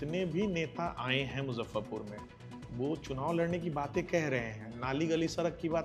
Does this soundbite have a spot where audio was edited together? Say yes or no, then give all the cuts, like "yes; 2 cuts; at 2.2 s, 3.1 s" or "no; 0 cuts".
no; 0 cuts